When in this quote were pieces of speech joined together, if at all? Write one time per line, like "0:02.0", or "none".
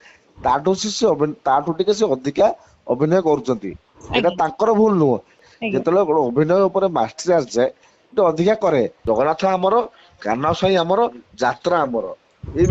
0:05.4
0:09.0

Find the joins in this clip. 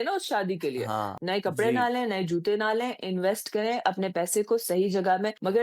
0:01.2

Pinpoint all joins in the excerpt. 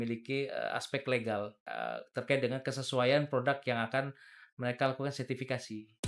0:01.6

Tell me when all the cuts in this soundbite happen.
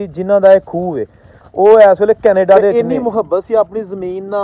0:02.7

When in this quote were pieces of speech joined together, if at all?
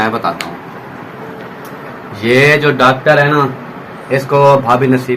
none

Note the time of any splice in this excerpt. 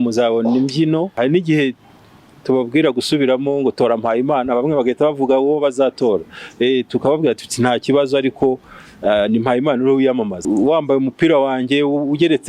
0:01.1
0:10.4

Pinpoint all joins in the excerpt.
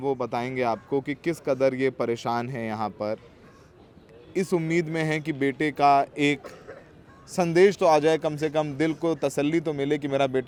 none

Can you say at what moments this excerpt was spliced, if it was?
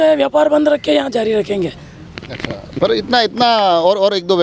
none

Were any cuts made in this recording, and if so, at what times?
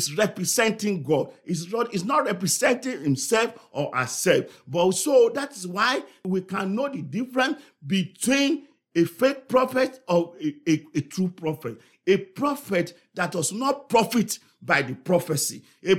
0:06.2

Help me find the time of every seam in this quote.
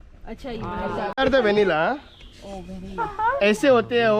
0:01.1

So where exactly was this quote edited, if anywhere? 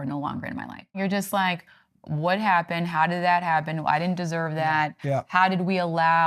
0:01.0

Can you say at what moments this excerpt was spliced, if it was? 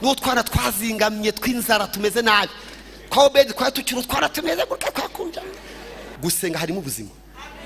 0:06.1

